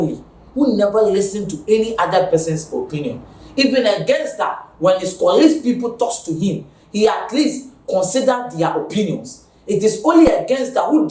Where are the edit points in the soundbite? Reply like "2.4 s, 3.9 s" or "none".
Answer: none